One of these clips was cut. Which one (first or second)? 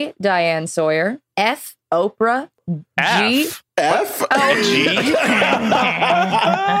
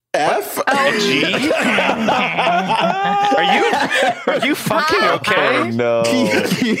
first